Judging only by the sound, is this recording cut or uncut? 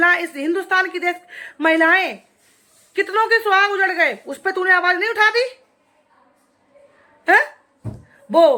uncut